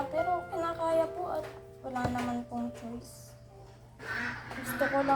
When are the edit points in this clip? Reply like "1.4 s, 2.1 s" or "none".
4.0 s